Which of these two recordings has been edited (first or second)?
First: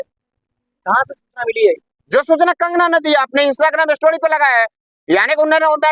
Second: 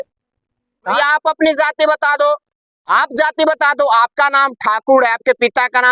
second